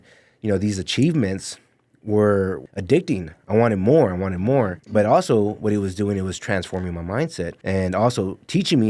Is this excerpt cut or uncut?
cut